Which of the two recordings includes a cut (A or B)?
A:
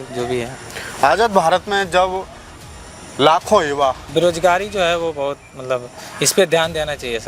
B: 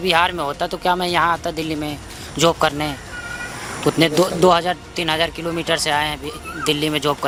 A